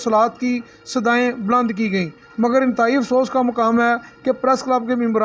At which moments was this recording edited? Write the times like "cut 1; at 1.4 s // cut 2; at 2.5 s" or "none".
none